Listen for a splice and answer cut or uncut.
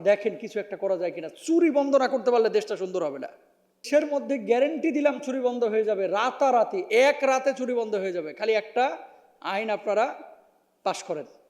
cut